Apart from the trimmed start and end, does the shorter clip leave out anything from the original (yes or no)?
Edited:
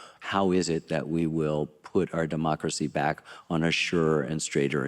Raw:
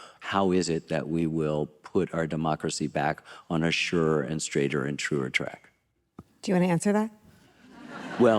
no